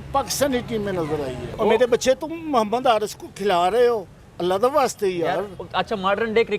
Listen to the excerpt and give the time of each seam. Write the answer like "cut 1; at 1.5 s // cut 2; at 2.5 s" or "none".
cut 1; at 1.5 s

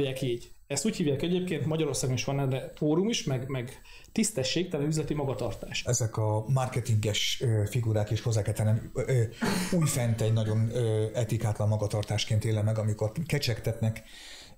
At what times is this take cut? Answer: cut 1; at 5.8 s

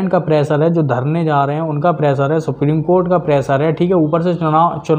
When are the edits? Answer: none

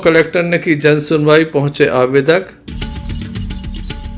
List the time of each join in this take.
cut 1; at 2.6 s

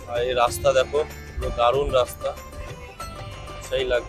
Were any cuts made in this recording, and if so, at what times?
none

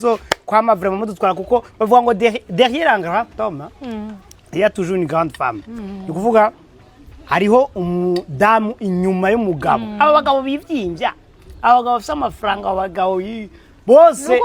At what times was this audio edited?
none

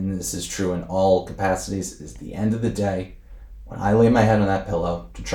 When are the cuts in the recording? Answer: none

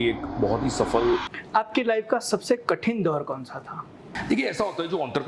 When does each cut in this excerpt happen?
cut 1; at 1.3 s // cut 2; at 4.1 s

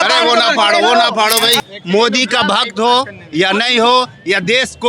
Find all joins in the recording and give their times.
cut 1; at 1.7 s

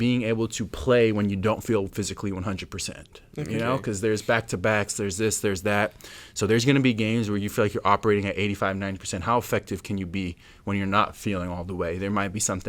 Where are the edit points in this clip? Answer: none

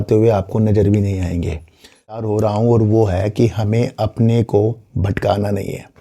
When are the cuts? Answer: cut 1; at 2.2 s

